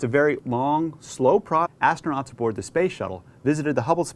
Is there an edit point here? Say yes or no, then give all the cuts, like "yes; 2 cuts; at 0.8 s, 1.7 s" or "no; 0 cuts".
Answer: no; 0 cuts